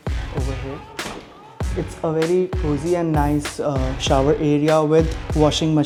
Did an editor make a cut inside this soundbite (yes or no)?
no